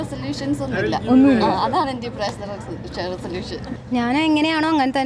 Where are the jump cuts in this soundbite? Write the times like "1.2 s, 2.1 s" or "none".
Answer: 3.7 s